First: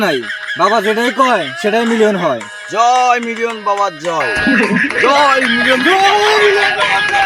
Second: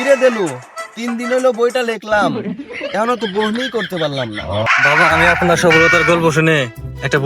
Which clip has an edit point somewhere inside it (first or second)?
second